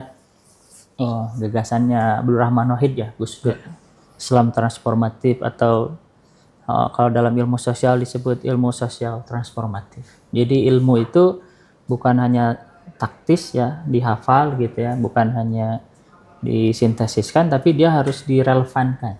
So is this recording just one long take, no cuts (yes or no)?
yes